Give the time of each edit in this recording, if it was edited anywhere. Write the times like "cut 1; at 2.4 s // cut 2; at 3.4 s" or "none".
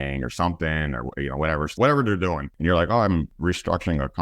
cut 1; at 1.8 s // cut 2; at 2.5 s // cut 3; at 3.3 s